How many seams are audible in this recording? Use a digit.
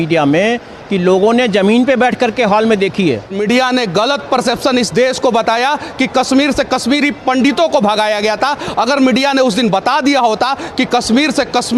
1